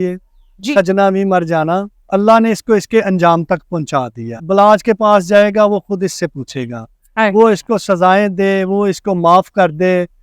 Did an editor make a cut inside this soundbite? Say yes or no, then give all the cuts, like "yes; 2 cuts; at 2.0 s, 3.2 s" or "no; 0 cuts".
yes; 2 cuts; at 2.0 s, 4.4 s